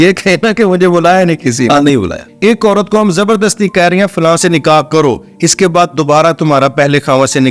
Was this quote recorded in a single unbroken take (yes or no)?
no